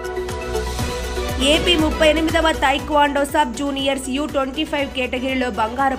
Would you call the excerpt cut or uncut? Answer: uncut